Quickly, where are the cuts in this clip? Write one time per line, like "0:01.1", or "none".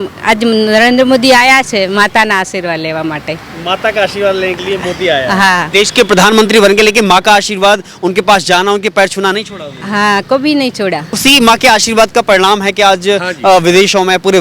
0:05.7
0:11.1